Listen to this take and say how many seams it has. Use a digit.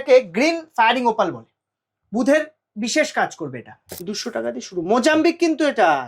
1